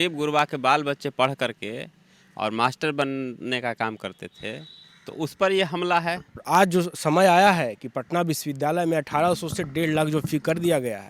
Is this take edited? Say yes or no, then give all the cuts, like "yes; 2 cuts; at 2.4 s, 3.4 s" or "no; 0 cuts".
yes; 1 cut; at 6.3 s